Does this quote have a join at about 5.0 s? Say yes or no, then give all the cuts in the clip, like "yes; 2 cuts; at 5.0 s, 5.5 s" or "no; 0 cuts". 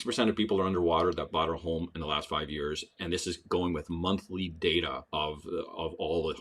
no; 0 cuts